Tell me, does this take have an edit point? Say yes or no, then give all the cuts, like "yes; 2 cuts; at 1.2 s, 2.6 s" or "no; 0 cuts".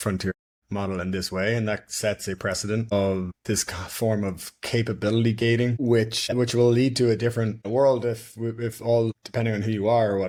no; 0 cuts